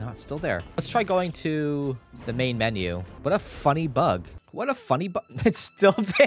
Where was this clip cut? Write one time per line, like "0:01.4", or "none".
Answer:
0:00.8
0:02.1
0:03.1
0:04.4